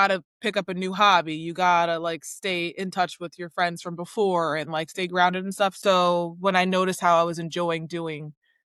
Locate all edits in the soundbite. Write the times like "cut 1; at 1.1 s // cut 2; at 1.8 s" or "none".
cut 1; at 5.8 s